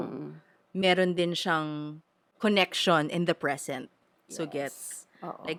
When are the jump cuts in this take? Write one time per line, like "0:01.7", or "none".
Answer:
none